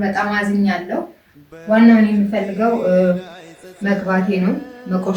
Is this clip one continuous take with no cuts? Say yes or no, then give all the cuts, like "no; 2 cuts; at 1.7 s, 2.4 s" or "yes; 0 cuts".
no; 1 cut; at 1.2 s